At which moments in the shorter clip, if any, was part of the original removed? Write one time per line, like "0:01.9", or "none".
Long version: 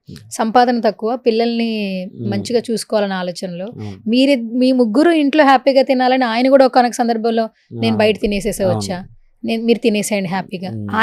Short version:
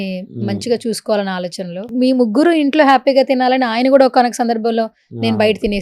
0:01.9